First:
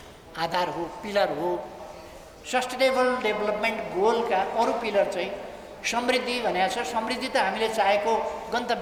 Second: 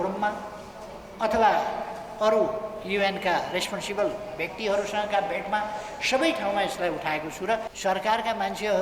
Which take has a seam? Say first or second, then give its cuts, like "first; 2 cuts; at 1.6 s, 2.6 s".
second; 1 cut; at 7.7 s